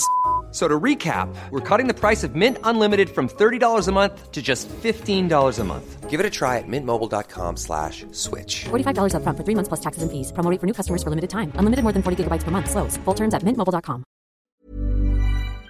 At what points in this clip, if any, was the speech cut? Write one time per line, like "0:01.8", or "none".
0:14.5